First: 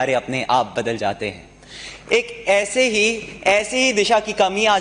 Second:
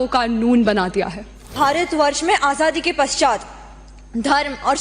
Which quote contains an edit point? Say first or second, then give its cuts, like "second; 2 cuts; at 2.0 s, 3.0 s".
second; 1 cut; at 1.5 s